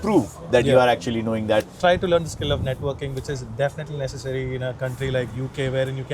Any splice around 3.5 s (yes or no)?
no